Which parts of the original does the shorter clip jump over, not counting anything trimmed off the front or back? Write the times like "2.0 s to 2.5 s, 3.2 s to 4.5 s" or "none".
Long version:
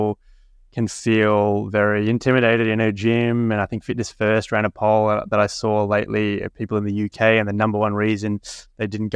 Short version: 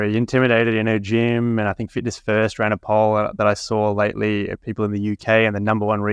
none